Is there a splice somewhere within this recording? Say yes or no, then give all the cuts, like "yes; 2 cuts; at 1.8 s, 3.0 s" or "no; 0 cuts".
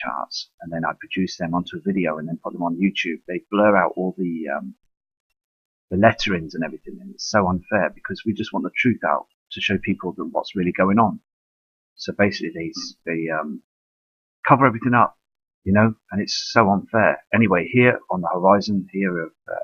no; 0 cuts